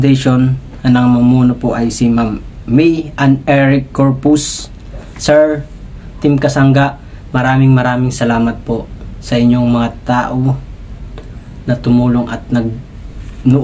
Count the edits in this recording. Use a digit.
0